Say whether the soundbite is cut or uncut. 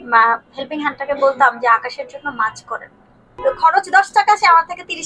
cut